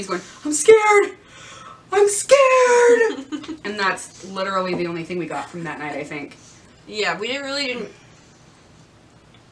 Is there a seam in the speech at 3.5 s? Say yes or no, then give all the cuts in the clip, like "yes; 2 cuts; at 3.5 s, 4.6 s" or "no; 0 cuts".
no; 0 cuts